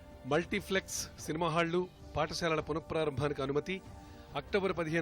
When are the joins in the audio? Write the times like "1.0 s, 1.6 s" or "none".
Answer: none